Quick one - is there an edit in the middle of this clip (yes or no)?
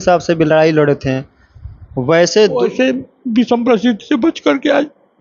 no